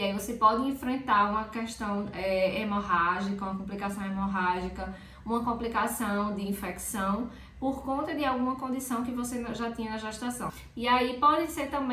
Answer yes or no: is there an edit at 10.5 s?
yes